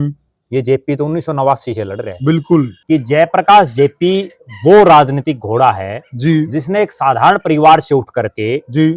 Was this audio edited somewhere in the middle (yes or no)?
yes